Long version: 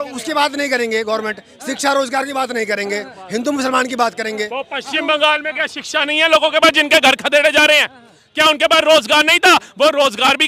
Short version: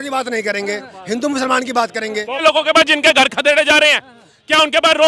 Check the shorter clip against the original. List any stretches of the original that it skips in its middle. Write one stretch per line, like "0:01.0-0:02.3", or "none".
0:04.6-0:06.3